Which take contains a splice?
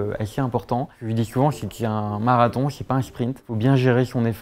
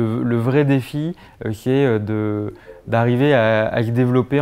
first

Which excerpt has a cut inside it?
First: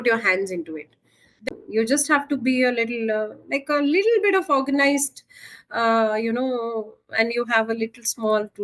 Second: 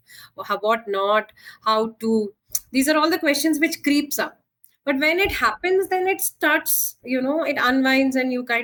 first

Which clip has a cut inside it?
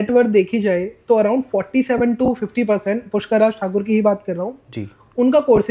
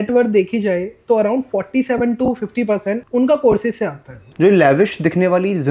second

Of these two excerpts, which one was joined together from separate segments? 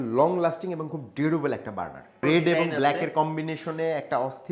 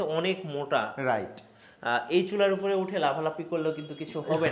first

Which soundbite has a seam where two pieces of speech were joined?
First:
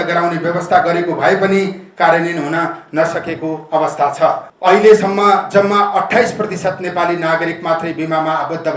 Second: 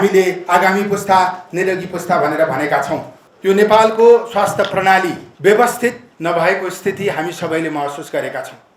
second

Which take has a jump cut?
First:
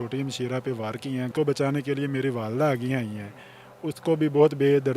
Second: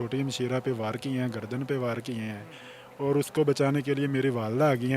first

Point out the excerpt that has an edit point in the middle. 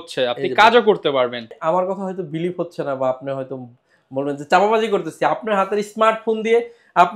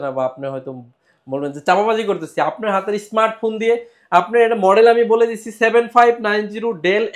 first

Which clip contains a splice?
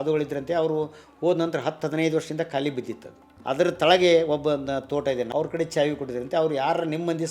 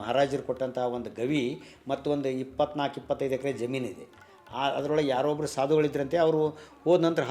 first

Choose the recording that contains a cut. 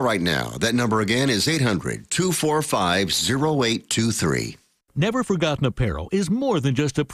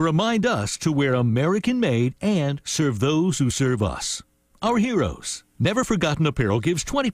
first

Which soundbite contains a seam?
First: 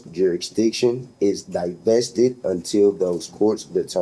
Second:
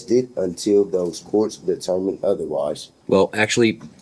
second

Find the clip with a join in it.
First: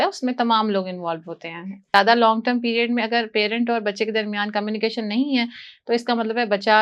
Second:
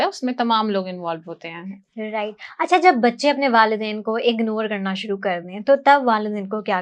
first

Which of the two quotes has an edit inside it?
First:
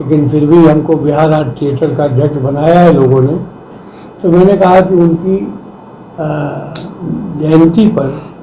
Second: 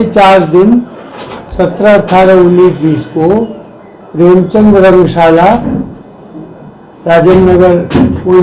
first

